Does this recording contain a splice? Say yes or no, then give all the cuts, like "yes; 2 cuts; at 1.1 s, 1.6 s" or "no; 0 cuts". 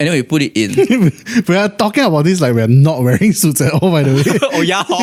no; 0 cuts